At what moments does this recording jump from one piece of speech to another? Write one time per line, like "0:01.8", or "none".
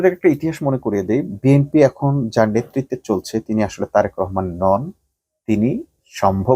none